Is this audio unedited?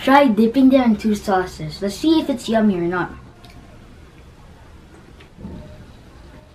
no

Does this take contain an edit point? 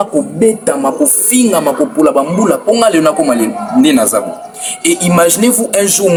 no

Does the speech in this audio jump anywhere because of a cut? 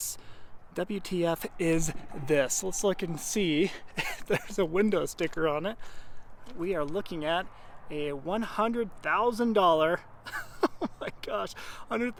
no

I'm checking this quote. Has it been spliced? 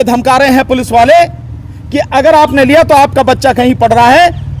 no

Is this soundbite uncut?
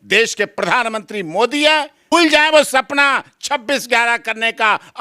no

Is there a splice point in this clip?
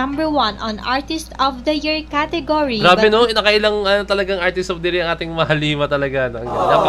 no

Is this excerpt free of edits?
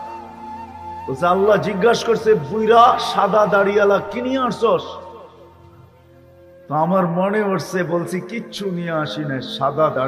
yes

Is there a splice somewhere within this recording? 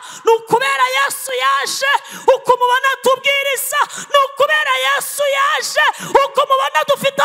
no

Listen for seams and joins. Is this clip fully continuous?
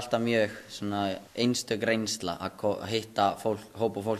no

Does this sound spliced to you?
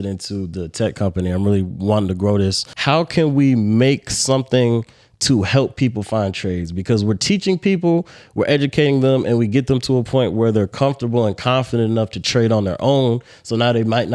yes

